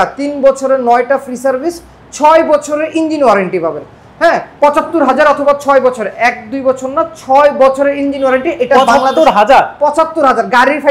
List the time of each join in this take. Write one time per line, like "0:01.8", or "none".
none

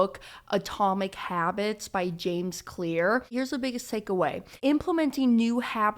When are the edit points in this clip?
0:03.3
0:04.5

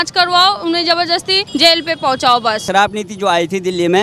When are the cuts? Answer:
0:01.4
0:02.7

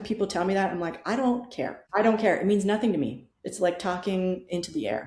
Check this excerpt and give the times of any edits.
0:01.8

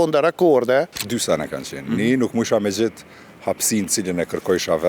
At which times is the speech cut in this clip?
0:01.0

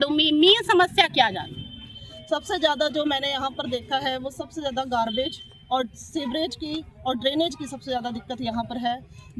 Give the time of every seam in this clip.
none

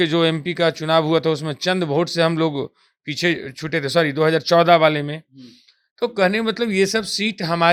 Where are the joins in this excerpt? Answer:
none

